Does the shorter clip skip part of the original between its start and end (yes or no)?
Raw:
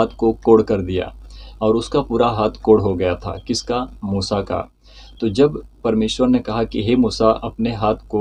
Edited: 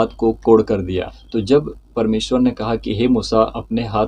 yes